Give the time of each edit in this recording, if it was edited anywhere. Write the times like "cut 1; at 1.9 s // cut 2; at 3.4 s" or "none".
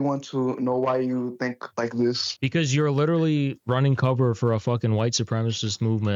none